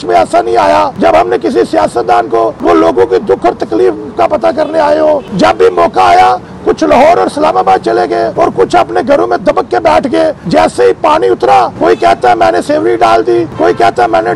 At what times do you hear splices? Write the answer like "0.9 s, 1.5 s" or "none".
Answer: 0.9 s, 2.6 s, 5.3 s, 8.3 s, 10.4 s, 11.7 s, 13.5 s